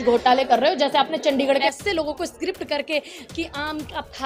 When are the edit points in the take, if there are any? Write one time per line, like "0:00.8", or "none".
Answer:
0:01.6